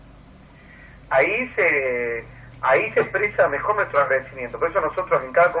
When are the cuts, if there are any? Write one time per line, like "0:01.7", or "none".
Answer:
0:02.9